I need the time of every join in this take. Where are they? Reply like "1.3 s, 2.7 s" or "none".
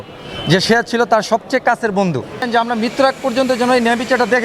2.4 s